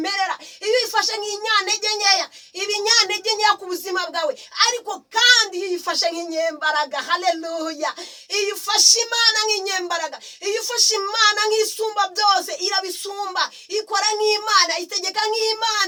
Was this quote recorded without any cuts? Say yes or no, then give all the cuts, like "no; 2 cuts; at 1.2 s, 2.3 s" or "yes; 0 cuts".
yes; 0 cuts